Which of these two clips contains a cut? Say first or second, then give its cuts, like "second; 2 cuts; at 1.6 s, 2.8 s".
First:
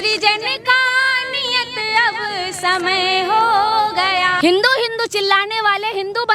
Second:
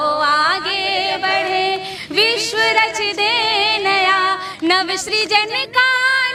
first; 1 cut; at 4.3 s